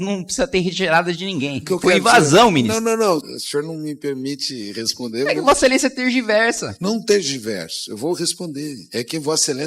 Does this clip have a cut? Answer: yes; 2 cuts; at 1.6 s, 3.2 s

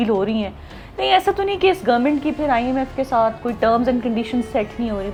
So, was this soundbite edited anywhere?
no; 0 cuts

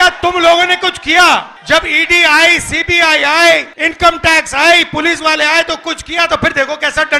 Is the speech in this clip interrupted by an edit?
yes; 2 cuts; at 1.5 s, 3.8 s

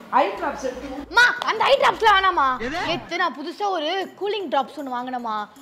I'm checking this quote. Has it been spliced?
no; 0 cuts

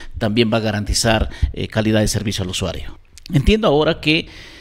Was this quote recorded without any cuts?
no; 1 cut; at 2.9 s

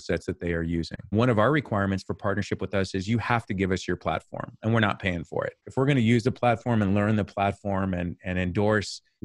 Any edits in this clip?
yes; 1 cut; at 1.0 s

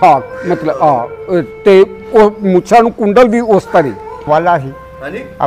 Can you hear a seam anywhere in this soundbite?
yes; 1 cut; at 4.2 s

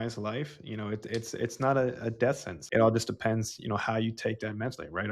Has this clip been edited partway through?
yes; 1 cut; at 2.5 s

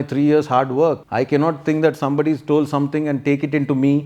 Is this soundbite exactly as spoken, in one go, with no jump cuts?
no; 1 cut; at 1.0 s

